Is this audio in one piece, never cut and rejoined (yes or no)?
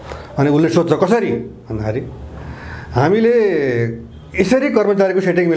yes